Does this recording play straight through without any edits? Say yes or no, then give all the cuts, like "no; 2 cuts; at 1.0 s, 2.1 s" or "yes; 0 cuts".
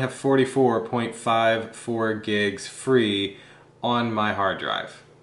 yes; 0 cuts